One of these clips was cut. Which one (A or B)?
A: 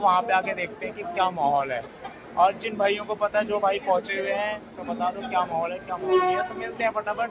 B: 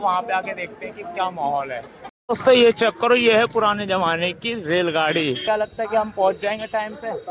B